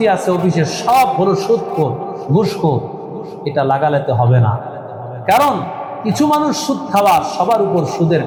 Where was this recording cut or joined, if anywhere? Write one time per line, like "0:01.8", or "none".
none